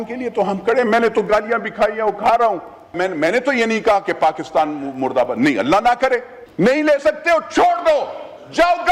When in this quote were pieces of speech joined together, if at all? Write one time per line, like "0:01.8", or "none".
0:03.0
0:06.4